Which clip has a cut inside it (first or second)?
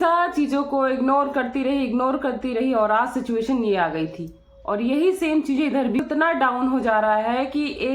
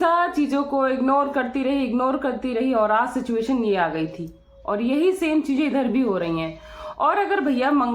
first